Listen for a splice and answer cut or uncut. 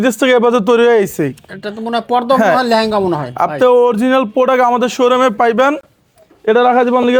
uncut